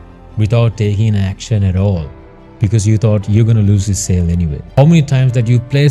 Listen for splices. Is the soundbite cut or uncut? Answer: cut